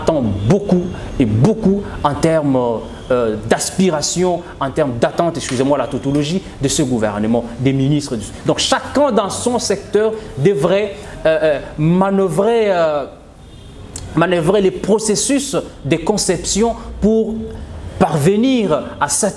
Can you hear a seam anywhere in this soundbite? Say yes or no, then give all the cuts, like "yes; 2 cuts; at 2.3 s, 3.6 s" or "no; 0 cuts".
no; 0 cuts